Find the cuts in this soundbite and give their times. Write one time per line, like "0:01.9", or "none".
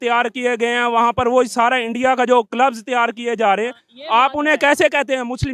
none